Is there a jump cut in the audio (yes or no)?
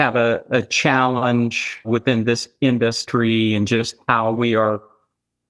yes